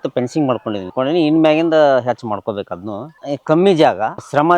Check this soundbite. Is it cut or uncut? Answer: cut